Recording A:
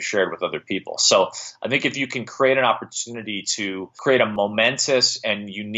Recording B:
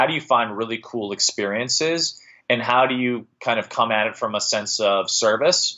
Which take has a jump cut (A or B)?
A